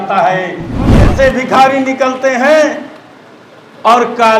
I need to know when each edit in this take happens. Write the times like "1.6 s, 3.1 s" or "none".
1.0 s